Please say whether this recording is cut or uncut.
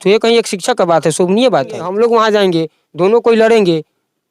cut